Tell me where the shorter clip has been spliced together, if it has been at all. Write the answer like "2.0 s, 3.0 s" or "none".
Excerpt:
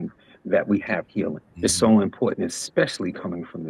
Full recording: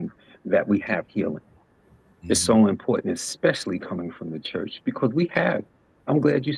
1.5 s